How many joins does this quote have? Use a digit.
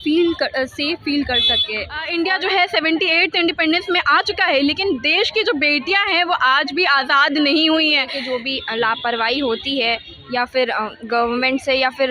2